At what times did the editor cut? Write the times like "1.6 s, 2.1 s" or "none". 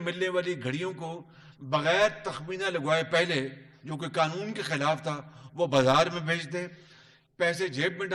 none